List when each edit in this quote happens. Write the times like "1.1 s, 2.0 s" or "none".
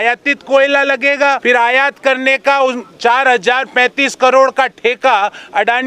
1.4 s